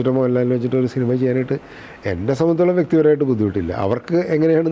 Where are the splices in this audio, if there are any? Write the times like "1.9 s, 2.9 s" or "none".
none

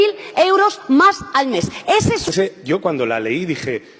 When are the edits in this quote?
2.3 s

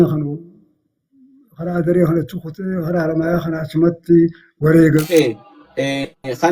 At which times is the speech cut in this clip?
5.0 s

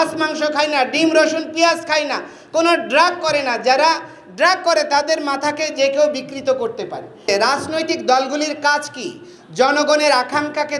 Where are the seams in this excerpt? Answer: 7.2 s

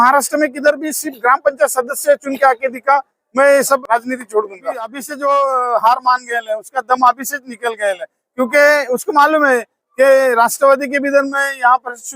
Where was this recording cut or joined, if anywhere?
3.8 s, 5.1 s

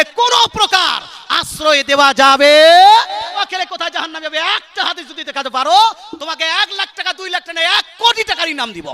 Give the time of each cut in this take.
3.3 s

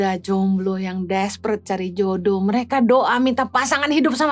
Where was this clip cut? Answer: none

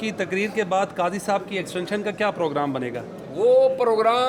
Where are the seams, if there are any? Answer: none

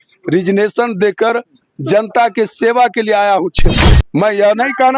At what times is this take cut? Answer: 3.8 s

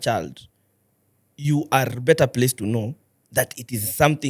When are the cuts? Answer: none

